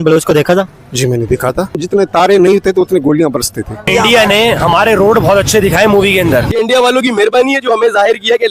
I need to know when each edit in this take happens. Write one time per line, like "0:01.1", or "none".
0:01.8
0:03.8
0:06.5